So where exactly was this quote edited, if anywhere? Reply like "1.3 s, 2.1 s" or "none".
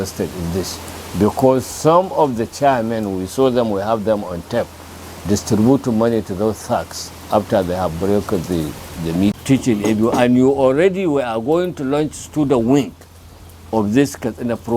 9.4 s